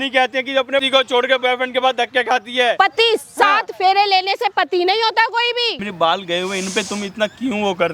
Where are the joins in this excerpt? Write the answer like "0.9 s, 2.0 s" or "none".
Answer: 0.9 s, 2.8 s, 5.9 s